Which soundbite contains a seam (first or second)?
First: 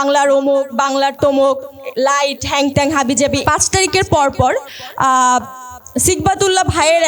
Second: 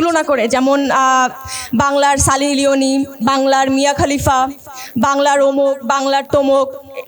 first